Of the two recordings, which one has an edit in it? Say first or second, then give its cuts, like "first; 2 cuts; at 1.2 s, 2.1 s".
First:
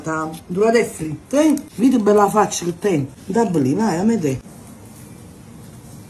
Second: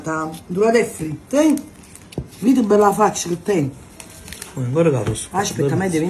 first; 2 cuts; at 1.7 s, 3.2 s